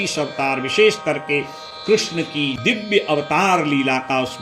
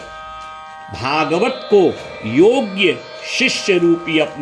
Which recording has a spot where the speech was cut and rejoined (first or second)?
first